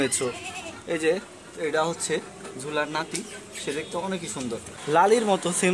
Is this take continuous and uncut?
no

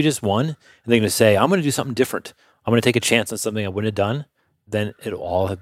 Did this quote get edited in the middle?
yes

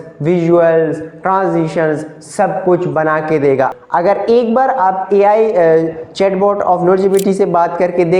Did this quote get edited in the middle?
yes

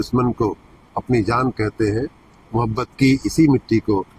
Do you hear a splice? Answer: no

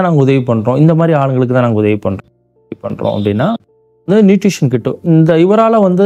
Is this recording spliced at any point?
no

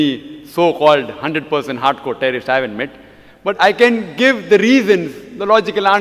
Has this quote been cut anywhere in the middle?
yes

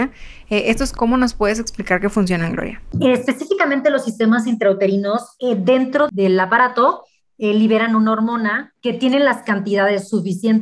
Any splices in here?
yes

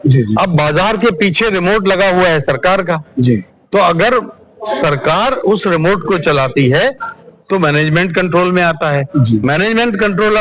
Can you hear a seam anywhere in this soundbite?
no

